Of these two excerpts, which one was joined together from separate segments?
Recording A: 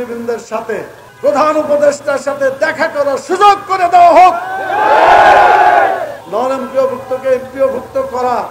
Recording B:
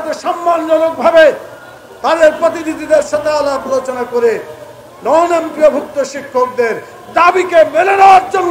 A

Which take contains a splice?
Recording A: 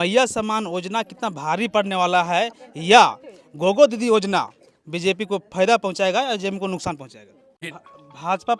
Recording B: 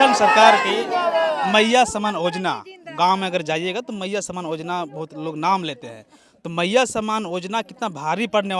A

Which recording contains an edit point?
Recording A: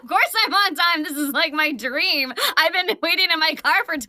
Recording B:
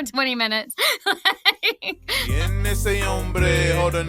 B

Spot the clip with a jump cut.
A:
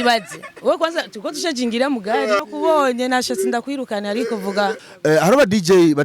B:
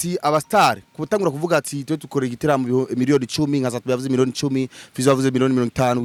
A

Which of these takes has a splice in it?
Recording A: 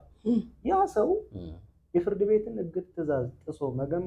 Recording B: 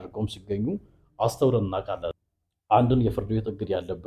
B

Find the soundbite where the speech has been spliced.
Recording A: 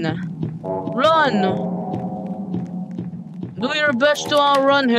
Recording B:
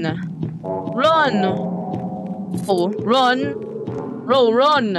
B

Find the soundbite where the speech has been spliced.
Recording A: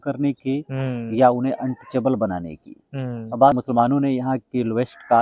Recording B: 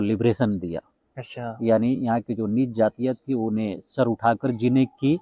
A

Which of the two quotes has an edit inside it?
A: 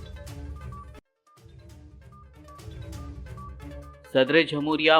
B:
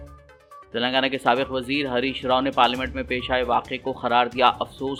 A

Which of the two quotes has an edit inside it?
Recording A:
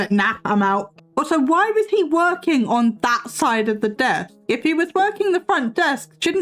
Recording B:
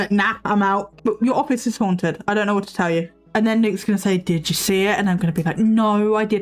B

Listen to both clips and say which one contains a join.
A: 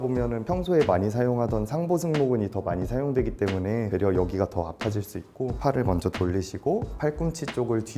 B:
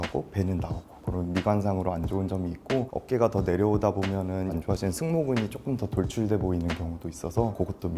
B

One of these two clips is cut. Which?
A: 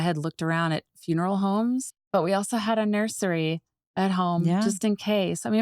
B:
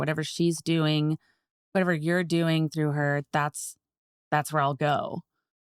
A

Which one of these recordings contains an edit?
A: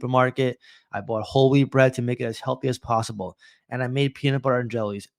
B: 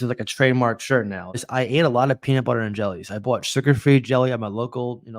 B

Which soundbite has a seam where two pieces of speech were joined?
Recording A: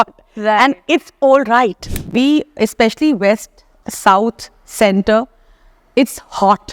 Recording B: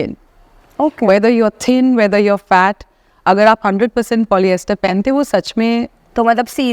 A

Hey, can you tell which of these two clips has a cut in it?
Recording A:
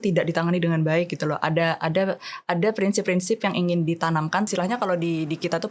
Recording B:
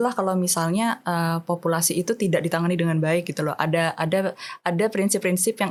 A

